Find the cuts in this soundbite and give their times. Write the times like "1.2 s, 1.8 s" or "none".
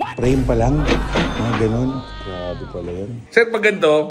3.2 s